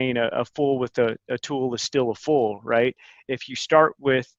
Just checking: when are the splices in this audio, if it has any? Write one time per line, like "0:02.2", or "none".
none